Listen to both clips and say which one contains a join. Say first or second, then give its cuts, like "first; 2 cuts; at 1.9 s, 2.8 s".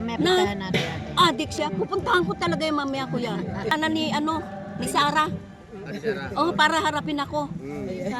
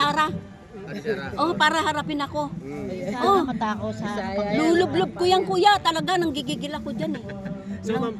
first; 1 cut; at 3.7 s